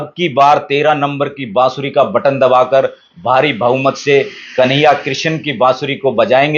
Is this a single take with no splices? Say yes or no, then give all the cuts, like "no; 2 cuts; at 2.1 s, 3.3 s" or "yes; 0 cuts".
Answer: yes; 0 cuts